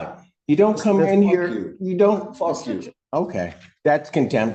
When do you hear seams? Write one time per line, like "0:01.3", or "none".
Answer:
none